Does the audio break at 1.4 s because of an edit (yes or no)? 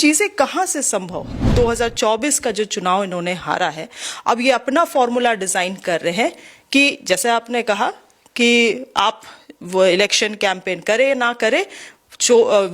yes